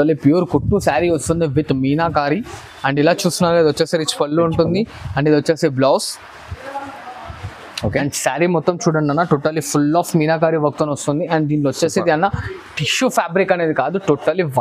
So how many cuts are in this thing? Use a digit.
0